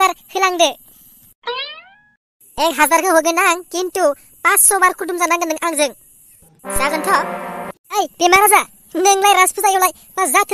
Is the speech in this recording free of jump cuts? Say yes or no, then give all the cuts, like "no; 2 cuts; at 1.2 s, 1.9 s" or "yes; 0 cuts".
no; 1 cut; at 7.9 s